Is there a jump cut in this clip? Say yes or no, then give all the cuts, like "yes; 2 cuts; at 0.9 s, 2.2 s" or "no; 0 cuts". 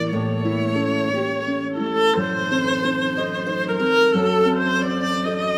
no; 0 cuts